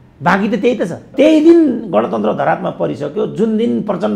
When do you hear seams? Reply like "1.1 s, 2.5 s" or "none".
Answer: 1.1 s